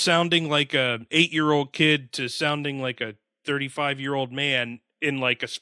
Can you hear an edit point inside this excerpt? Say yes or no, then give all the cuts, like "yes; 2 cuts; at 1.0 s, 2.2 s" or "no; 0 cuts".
no; 0 cuts